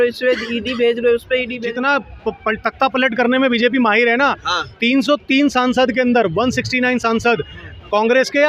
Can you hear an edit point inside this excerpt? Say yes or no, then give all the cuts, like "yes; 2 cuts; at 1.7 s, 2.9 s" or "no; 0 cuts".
yes; 1 cut; at 1.6 s